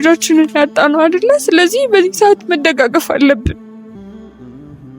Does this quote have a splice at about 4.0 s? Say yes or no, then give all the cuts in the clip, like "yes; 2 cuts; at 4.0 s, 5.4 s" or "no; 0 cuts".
yes; 1 cut; at 4.0 s